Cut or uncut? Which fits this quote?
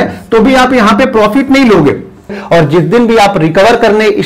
cut